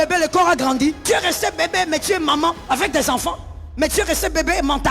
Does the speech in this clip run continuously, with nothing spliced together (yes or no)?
no